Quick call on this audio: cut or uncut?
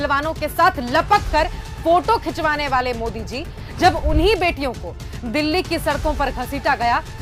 uncut